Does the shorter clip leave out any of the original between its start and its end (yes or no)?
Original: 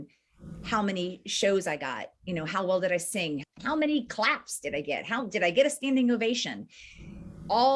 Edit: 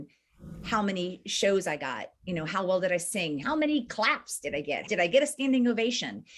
yes